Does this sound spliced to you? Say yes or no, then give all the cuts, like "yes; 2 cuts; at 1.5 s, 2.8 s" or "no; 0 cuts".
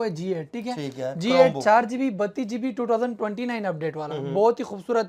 no; 0 cuts